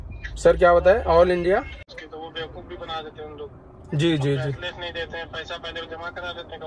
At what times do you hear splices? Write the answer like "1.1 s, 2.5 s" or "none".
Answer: 1.9 s